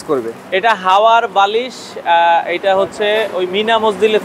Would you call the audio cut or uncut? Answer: uncut